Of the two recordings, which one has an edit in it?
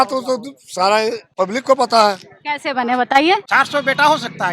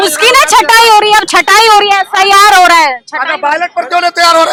first; 2 cuts; at 1.2 s, 3.5 s

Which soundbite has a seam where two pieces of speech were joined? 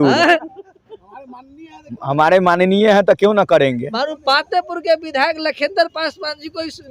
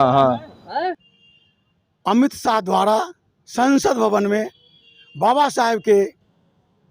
second; 1 cut; at 1.1 s

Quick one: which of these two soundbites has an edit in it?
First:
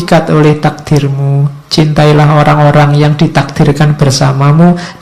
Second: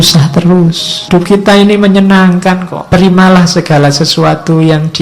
second; 2 cuts; at 1.1 s, 2.7 s

